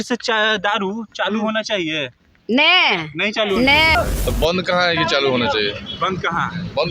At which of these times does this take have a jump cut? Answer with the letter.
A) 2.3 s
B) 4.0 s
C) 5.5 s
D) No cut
B